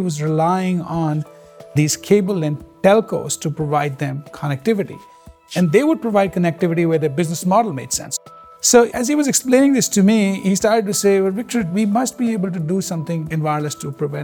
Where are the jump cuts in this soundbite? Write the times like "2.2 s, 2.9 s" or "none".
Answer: 9.0 s